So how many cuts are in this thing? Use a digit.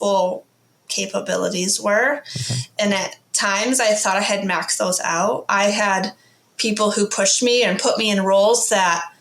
1